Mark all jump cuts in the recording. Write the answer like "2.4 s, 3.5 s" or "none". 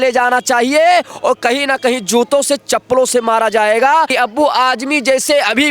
4.1 s